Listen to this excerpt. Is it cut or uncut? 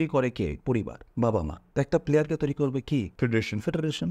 cut